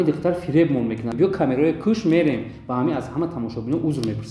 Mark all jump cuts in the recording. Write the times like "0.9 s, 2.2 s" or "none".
1.1 s